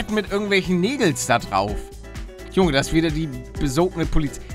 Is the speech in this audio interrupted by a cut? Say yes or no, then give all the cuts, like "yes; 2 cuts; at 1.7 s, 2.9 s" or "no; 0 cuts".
no; 0 cuts